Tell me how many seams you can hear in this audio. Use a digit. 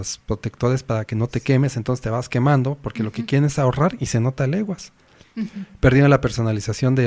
0